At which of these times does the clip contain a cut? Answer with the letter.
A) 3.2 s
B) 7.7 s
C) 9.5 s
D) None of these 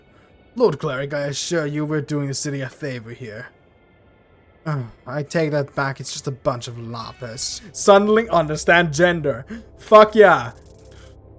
B